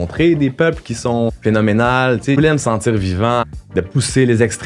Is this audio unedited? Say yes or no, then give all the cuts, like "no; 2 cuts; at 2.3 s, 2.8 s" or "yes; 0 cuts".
no; 3 cuts; at 1.3 s, 2.4 s, 3.5 s